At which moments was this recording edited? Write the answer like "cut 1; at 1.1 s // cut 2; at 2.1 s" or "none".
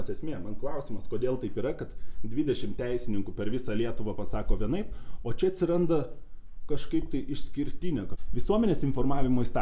cut 1; at 8.2 s